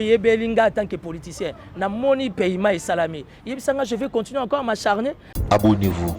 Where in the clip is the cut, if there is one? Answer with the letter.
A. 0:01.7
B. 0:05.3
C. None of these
B